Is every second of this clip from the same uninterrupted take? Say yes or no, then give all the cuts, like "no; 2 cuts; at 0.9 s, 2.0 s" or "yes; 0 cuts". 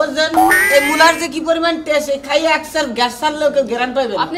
yes; 0 cuts